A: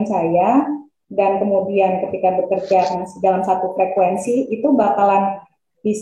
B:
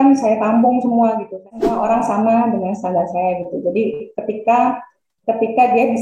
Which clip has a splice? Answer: B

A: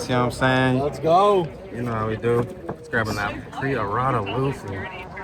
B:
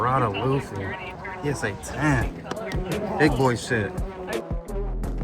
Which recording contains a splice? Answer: B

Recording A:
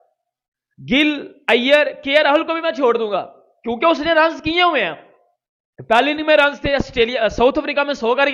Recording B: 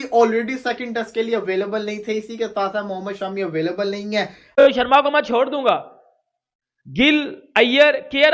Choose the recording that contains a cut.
B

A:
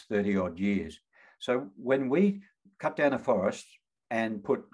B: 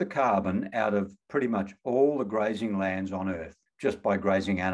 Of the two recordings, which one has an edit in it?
B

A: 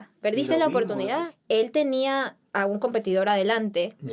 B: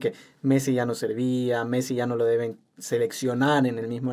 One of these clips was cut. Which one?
A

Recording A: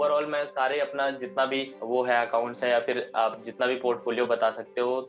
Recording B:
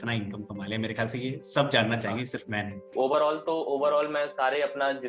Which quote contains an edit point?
B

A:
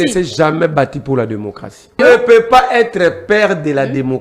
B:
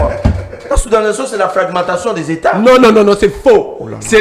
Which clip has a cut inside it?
A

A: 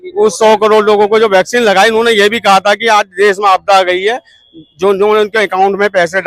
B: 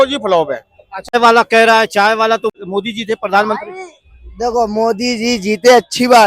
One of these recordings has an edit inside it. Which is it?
B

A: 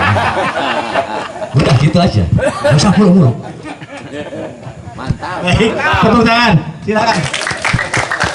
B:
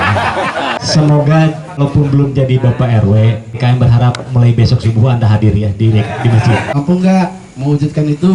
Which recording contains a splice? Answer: B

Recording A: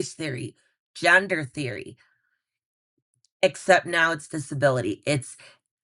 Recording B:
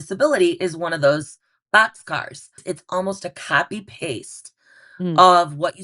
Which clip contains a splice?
B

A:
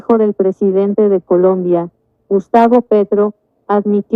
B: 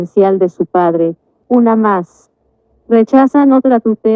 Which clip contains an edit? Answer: B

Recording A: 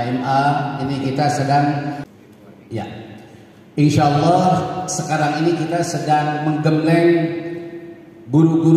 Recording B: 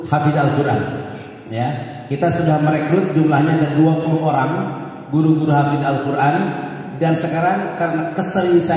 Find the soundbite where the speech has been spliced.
A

